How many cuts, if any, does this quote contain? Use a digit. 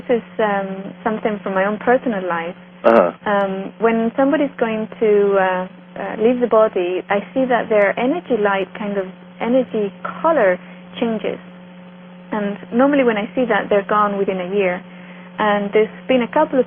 1